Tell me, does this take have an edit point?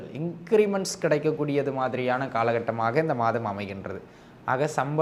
no; 0 cuts

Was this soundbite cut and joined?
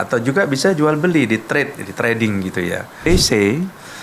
yes; 1 cut; at 3.0 s

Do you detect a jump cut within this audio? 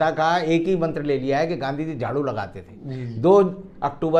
no; 0 cuts

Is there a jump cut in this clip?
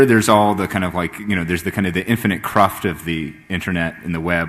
no; 0 cuts

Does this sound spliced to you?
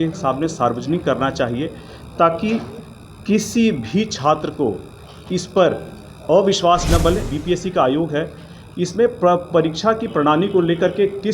yes; 1 cut; at 7.3 s

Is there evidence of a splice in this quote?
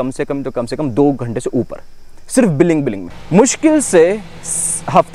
yes; 1 cut; at 3.1 s

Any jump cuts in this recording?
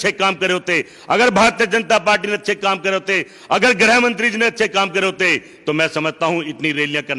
no; 0 cuts

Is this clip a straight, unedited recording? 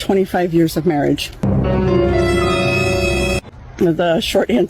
yes; 0 cuts

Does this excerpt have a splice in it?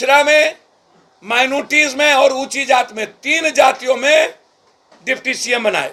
no; 0 cuts

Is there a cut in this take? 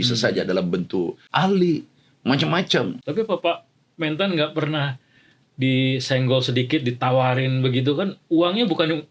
yes; 2 cuts; at 1.2 s, 3.0 s

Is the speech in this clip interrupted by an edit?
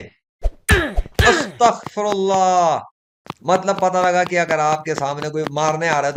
no; 0 cuts

